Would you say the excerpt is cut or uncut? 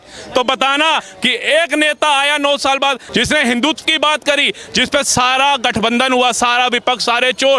cut